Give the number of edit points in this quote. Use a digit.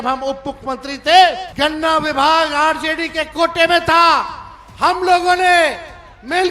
1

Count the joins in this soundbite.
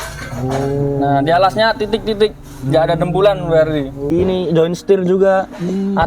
1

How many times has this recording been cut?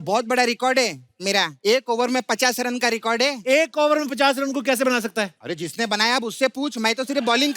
2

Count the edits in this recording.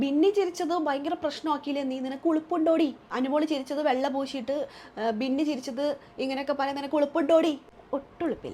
2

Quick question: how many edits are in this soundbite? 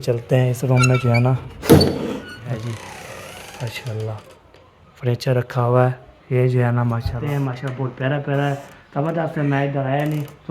2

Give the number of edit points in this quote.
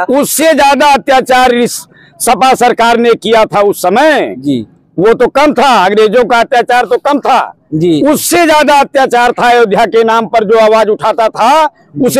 0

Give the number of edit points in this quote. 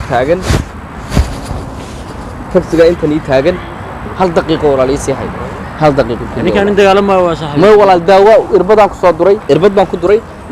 1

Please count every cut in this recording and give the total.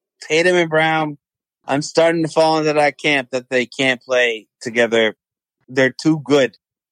1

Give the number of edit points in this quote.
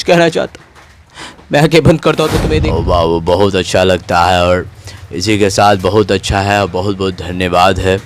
1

